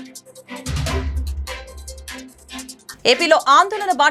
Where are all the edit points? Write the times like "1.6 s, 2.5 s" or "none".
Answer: 2.8 s